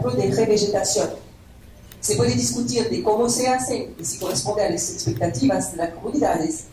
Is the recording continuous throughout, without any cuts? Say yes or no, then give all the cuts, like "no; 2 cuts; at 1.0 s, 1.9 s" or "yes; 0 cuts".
yes; 0 cuts